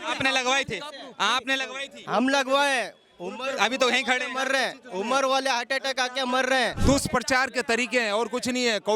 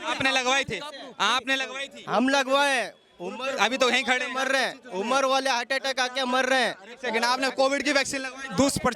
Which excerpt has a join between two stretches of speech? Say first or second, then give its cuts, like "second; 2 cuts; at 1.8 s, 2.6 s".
first; 1 cut; at 6.8 s